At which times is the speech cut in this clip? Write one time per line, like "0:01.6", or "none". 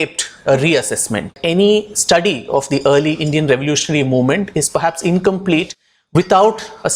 0:01.4